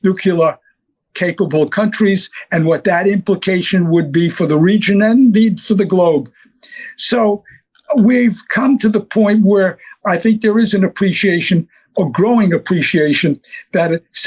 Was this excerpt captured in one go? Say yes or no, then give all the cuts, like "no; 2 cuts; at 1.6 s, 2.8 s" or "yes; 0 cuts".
yes; 0 cuts